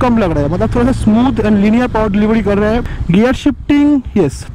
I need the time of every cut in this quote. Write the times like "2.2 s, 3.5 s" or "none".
2.8 s